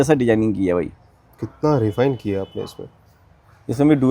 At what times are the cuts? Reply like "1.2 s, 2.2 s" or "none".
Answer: none